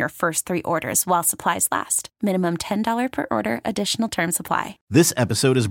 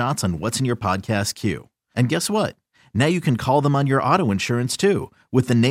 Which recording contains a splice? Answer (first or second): first